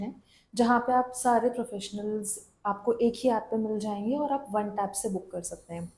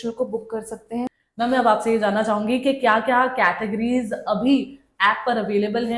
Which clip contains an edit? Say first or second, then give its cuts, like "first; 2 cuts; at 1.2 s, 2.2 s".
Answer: second; 1 cut; at 1.1 s